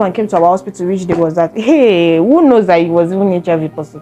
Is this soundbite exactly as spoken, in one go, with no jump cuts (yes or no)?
yes